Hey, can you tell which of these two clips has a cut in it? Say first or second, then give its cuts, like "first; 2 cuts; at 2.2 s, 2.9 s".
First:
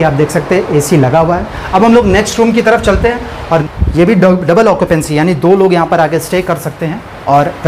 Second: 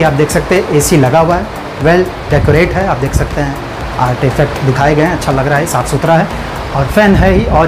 first; 2 cuts; at 1.5 s, 3.6 s